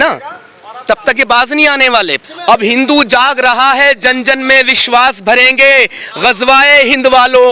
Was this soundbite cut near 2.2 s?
yes; 1 cut; at 2.2 s

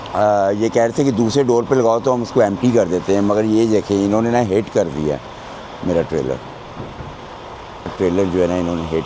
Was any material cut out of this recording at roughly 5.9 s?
no; 0 cuts

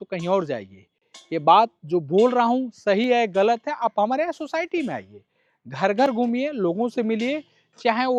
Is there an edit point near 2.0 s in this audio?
no; 0 cuts

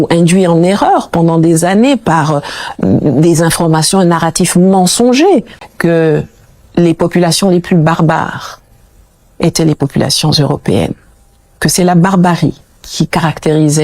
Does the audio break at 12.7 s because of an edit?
no; 1 cut; at 5.6 s

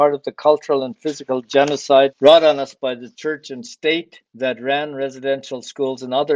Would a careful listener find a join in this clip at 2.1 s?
yes; 3 cuts; at 2.1 s, 3.1 s, 4.2 s

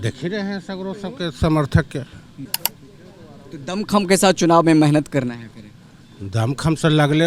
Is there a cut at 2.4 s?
yes; 1 cut; at 2.4 s

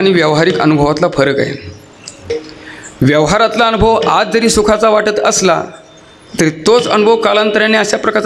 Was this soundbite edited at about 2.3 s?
yes; 1 cut; at 2.3 s

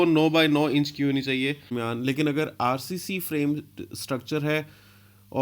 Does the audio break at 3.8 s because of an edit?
no; 1 cut; at 1.7 s

